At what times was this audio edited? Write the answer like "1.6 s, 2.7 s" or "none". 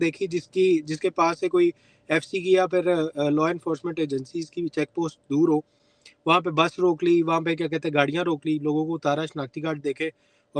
none